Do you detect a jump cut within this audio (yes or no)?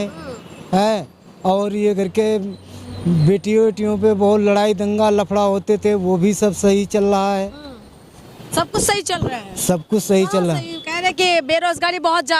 no